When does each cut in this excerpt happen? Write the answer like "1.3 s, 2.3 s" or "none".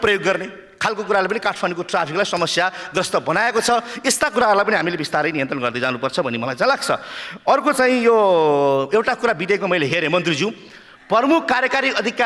none